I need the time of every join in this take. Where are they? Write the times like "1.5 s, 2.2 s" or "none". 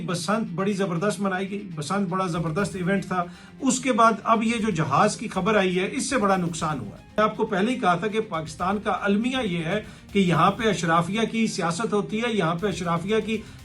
7.2 s